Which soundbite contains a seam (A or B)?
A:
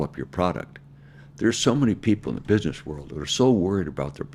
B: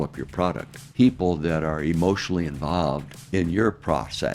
B